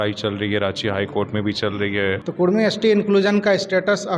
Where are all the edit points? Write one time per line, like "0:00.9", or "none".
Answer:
0:02.2